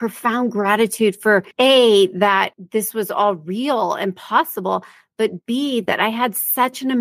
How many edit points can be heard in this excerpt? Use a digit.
2